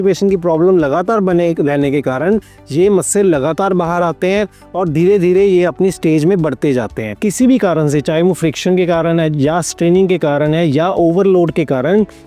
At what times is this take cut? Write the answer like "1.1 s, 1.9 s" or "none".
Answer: 7.0 s